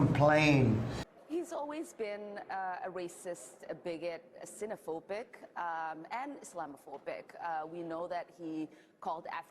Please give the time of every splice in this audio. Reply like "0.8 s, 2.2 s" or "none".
1.2 s